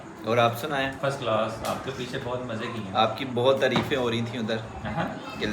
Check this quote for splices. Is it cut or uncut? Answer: cut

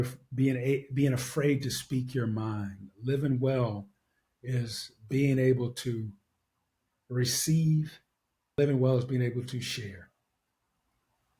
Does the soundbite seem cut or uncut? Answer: cut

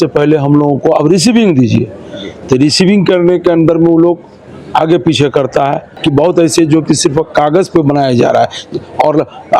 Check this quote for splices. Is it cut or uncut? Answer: cut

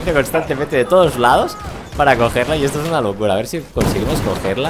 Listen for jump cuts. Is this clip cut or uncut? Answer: uncut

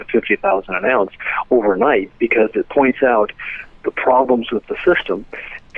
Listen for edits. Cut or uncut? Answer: uncut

